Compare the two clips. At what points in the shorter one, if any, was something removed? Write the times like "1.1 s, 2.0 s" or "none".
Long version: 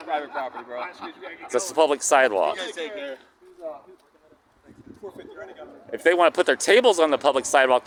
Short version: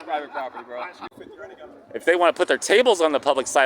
1.2 s